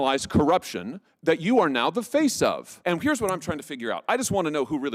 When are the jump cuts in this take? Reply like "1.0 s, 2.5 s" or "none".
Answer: 2.7 s